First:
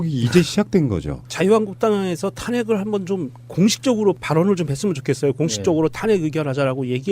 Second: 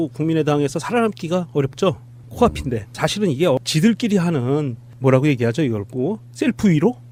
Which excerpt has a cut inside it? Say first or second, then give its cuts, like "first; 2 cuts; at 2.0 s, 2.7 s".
first; 1 cut; at 3.8 s